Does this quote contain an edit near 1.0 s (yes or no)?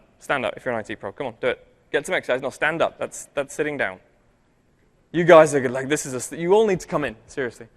no